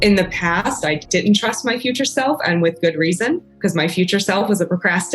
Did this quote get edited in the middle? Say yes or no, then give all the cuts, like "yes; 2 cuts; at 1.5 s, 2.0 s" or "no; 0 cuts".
yes; 2 cuts; at 1.0 s, 3.5 s